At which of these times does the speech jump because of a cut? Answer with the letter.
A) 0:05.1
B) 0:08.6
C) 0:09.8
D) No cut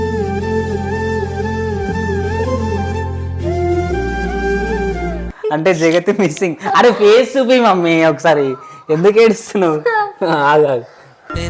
D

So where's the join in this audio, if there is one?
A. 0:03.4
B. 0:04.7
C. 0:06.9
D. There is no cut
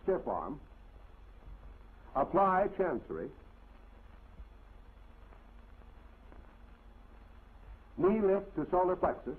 A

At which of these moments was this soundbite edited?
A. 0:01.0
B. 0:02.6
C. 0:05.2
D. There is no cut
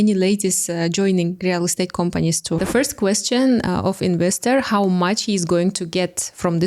B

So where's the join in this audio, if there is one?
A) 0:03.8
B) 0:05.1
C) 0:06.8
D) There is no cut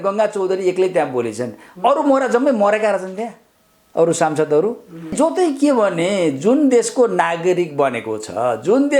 B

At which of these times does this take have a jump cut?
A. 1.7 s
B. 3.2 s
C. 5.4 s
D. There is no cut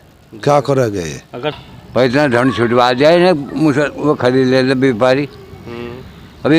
A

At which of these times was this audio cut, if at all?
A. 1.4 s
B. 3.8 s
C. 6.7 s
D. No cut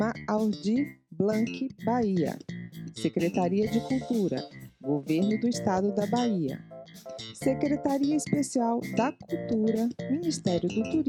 D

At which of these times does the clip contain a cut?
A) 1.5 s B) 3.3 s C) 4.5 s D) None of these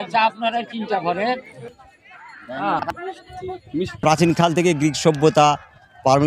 A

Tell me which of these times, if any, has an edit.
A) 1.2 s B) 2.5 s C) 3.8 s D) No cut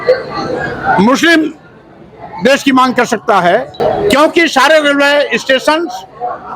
C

